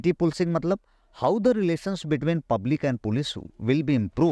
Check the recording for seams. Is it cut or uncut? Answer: uncut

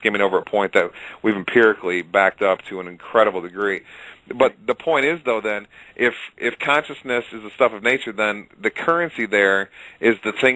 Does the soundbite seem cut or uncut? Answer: uncut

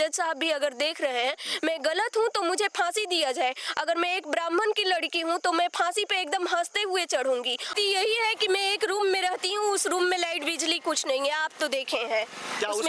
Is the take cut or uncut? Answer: cut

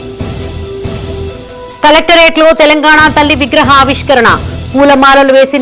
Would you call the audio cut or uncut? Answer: cut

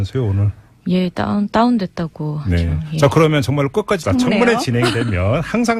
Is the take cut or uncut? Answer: uncut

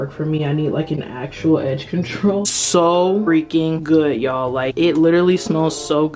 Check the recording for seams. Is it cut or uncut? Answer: cut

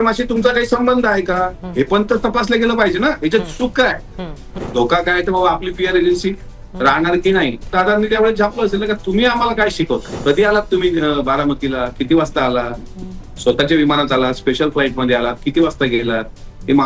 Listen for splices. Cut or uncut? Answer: cut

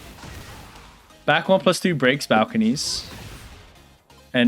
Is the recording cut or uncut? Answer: cut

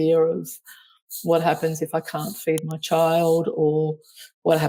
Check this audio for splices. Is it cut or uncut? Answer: uncut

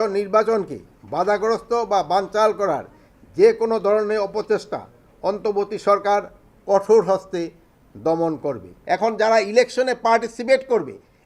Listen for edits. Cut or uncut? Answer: cut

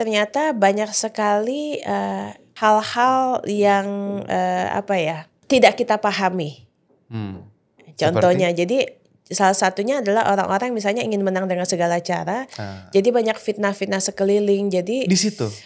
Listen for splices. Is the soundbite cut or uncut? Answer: cut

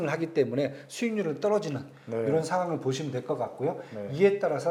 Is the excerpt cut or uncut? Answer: uncut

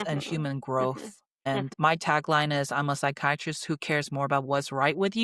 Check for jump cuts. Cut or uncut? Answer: cut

